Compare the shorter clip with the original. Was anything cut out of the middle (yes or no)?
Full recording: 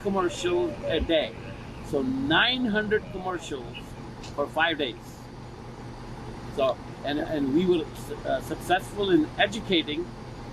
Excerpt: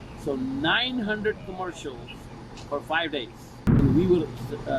yes